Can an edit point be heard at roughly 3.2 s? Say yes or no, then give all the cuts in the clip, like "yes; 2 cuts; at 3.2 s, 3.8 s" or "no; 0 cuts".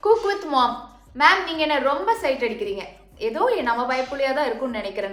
no; 0 cuts